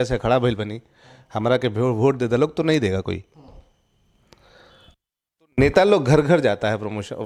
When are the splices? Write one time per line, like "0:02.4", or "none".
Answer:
none